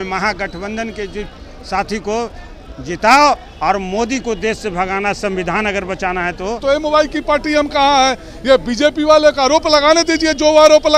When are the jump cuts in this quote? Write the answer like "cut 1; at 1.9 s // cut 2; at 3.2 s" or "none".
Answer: cut 1; at 6.6 s